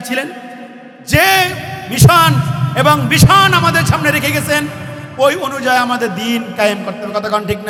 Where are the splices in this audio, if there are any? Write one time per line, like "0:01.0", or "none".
none